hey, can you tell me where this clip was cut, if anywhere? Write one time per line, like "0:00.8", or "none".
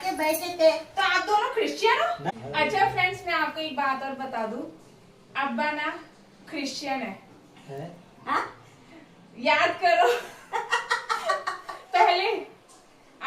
0:02.2